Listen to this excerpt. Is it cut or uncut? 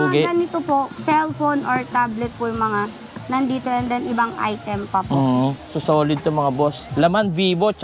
cut